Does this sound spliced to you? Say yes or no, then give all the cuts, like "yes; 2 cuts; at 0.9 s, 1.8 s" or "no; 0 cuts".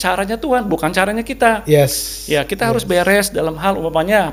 no; 0 cuts